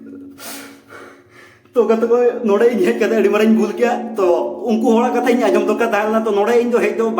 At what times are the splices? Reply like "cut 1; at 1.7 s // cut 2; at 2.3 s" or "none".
none